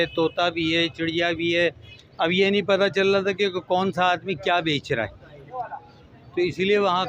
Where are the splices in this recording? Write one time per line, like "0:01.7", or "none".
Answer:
none